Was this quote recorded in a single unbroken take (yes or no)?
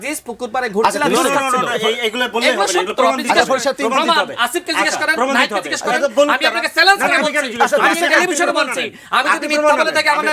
yes